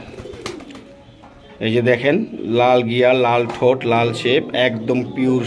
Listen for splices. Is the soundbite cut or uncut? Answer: uncut